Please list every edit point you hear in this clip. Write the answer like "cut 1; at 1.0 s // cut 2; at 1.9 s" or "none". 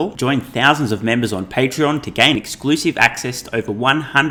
none